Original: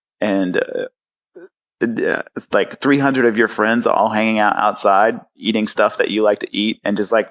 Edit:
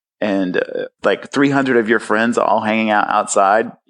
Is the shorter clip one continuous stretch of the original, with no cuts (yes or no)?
no